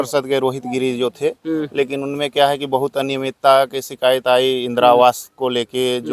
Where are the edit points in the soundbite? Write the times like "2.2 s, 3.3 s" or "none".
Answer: none